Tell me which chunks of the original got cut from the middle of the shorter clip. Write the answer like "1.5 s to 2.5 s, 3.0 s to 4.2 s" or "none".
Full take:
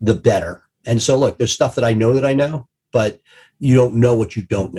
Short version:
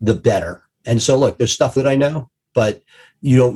1.8 s to 2.1 s